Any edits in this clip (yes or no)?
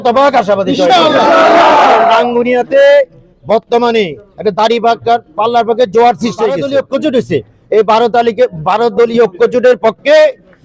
yes